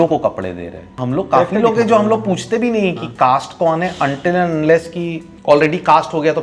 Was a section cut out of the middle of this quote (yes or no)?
yes